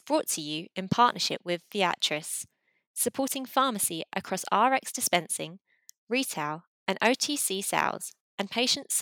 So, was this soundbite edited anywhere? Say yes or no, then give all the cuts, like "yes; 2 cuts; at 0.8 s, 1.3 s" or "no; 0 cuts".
no; 0 cuts